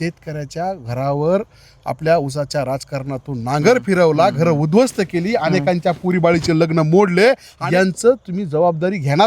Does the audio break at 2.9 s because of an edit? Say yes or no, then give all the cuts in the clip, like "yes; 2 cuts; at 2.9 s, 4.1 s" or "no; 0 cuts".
no; 1 cut; at 7.5 s